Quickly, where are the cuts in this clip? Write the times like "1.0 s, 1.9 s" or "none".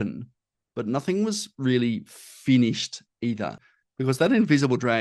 3.6 s